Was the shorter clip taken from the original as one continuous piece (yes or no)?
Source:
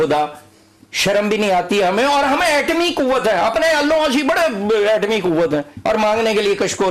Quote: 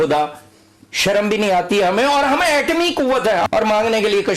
no